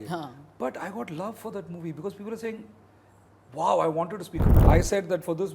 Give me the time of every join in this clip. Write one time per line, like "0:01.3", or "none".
0:04.6